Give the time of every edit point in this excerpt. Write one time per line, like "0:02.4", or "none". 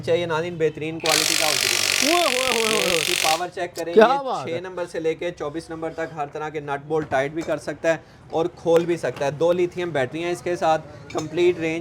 none